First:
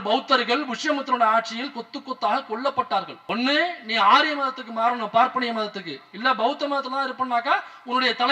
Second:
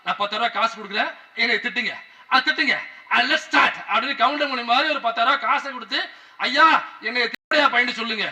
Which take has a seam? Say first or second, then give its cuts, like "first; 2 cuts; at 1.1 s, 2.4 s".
first; 1 cut; at 3.2 s